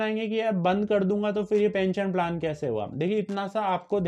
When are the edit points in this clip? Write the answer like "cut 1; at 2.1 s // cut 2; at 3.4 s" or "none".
none